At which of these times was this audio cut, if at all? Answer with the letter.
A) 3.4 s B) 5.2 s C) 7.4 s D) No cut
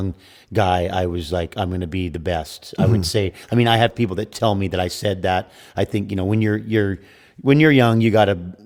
D